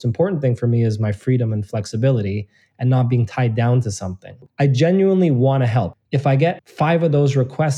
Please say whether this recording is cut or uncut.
cut